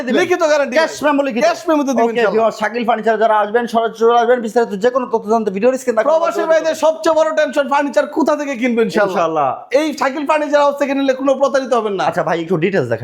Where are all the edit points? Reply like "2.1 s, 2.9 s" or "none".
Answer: none